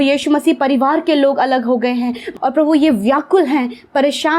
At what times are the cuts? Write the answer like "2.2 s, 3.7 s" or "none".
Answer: 2.3 s